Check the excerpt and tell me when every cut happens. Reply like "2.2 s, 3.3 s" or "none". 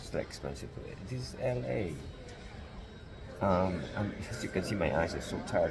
none